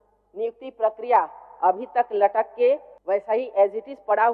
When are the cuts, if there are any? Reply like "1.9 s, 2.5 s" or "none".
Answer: 2.9 s